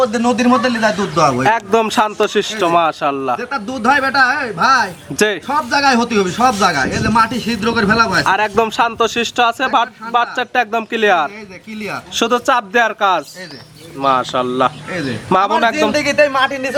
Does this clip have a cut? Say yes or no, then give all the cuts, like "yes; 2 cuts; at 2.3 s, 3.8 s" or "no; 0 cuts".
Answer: no; 0 cuts